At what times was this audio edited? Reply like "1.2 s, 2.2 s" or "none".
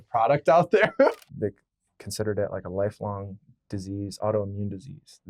1.2 s